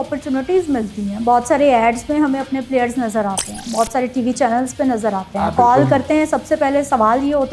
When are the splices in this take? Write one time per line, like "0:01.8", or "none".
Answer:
none